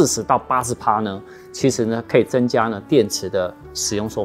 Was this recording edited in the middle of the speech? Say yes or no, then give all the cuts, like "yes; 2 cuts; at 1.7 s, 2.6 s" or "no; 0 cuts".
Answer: no; 0 cuts